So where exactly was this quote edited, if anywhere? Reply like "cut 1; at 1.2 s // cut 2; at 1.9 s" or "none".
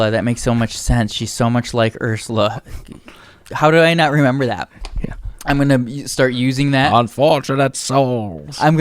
none